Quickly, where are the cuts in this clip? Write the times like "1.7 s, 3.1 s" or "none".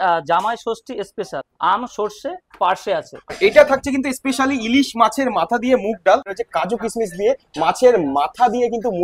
1.4 s, 3.3 s, 6.4 s